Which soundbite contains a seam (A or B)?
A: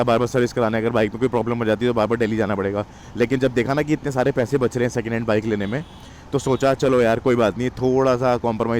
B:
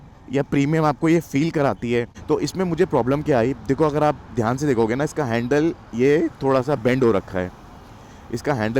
B